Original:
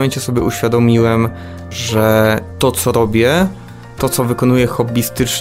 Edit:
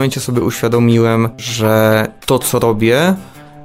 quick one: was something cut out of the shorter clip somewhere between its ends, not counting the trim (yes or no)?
yes